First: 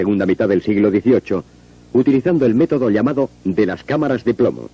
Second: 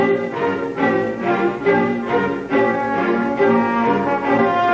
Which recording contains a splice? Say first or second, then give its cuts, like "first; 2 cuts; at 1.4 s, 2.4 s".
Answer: second; 1 cut; at 1.9 s